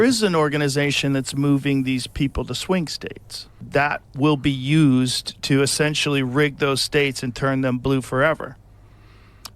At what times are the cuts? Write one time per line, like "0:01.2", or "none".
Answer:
0:03.6